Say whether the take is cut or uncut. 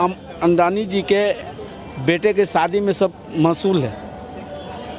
uncut